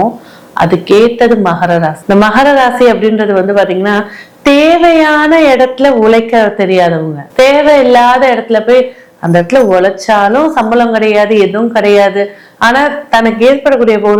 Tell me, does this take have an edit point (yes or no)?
no